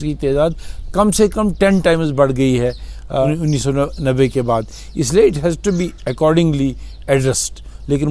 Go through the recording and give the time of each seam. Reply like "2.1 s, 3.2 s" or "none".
none

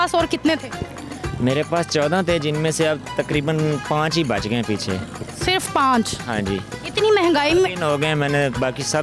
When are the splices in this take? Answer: none

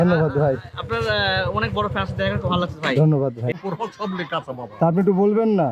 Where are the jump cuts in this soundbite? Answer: 2.1 s, 3.6 s

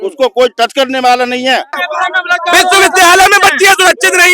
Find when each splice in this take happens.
1.8 s

